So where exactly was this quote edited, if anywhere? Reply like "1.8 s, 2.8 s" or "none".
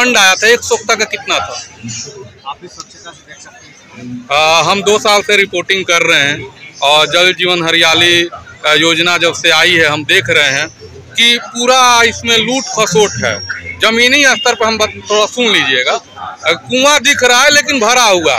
2.3 s